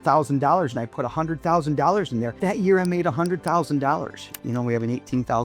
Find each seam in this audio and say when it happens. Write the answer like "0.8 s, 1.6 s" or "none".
4.4 s

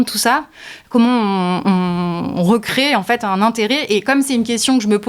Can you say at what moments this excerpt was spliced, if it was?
none

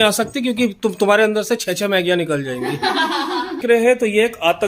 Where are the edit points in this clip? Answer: 3.6 s

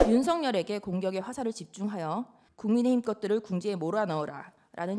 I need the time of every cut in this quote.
2.4 s

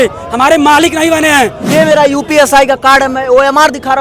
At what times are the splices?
1.6 s

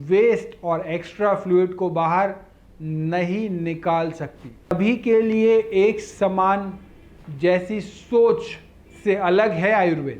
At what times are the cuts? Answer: 4.7 s

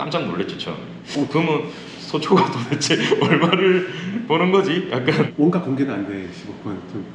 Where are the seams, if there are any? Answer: 0.9 s, 5.3 s

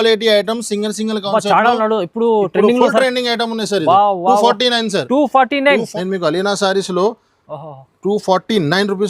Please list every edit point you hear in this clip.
5.9 s

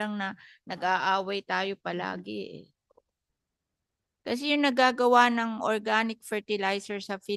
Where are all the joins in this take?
none

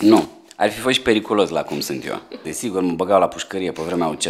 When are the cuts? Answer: 2.5 s

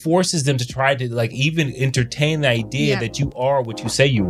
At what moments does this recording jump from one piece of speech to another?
none

